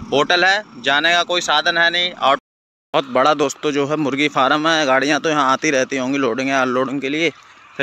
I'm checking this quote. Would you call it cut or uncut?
cut